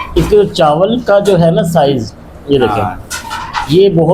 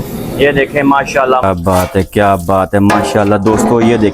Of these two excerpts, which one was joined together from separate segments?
second; 1 cut; at 1.4 s

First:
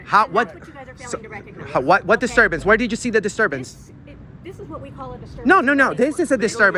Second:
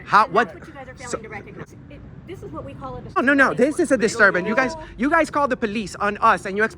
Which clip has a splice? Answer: second; 2 cuts; at 1.6 s, 3.2 s

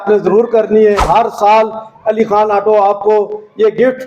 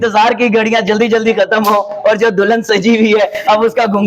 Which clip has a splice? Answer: first; 1 cut; at 1.0 s

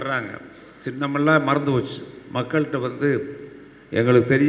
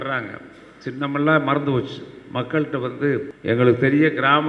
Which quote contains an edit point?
second; 1 cut; at 3.3 s

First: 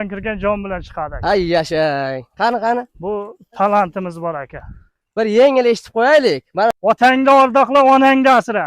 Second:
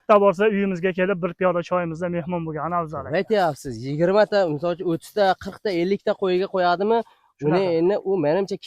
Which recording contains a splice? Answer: first; 1 cut; at 6.7 s

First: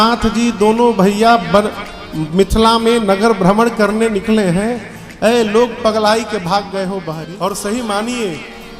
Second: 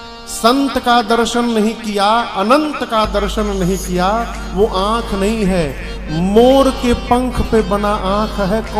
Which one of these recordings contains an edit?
first; 1 cut; at 7.1 s

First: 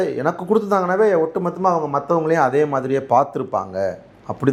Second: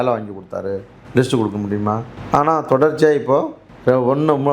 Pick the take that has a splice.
second; 3 cuts; at 0.9 s, 2.1 s, 3.6 s

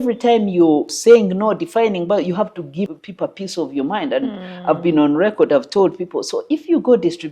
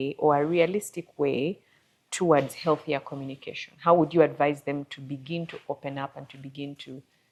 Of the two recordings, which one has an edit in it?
first; 2 cuts; at 0.9 s, 2.9 s

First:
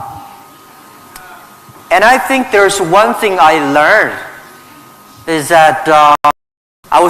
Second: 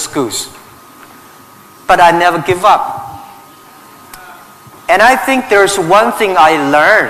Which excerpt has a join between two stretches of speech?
first; 1 cut; at 6.2 s

